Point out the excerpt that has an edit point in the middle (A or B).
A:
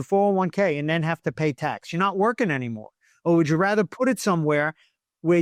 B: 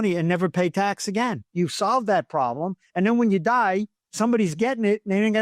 B